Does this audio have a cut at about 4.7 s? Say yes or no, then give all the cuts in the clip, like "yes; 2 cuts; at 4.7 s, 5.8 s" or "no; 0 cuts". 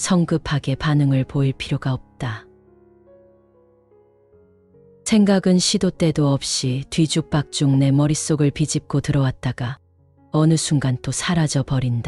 yes; 2 cuts; at 3.0 s, 4.7 s